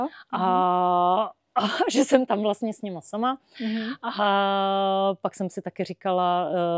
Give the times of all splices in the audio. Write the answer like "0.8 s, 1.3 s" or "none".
none